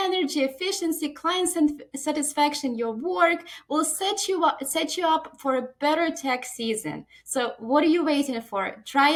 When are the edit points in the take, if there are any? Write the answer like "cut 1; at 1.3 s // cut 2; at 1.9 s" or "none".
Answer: none